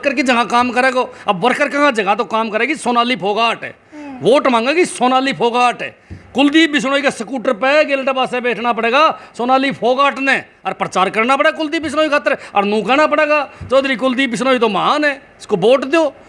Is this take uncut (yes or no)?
yes